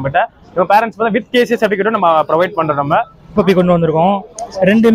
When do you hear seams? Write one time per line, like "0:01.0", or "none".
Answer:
0:03.3